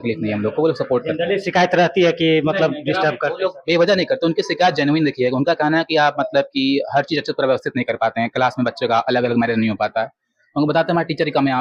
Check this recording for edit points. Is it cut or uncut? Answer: uncut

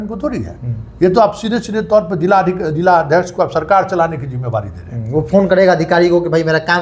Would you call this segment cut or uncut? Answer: uncut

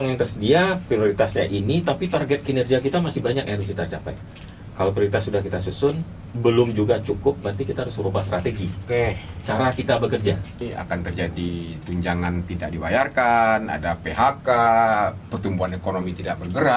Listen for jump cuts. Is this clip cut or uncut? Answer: cut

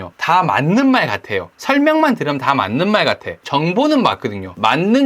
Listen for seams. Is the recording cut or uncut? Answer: cut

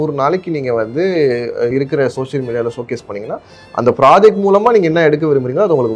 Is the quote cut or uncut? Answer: uncut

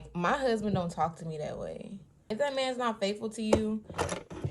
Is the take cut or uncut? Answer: cut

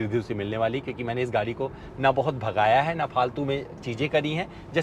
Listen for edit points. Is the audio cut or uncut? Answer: uncut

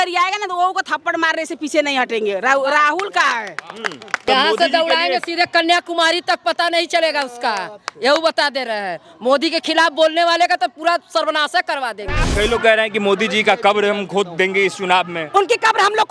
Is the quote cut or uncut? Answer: cut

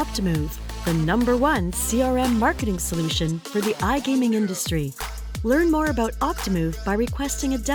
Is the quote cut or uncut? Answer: uncut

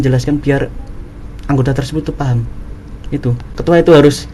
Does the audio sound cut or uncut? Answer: uncut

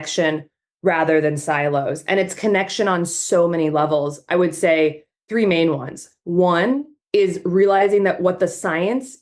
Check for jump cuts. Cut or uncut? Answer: cut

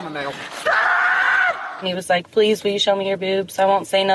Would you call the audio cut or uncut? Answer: cut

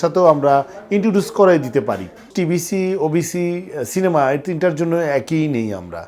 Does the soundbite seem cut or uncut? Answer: cut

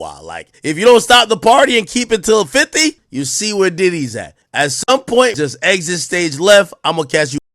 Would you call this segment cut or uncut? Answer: cut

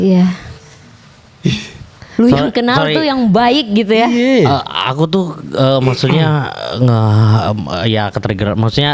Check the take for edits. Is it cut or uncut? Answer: uncut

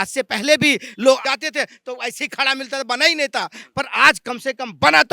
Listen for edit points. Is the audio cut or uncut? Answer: cut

